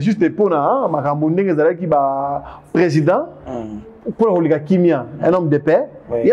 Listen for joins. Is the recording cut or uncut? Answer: uncut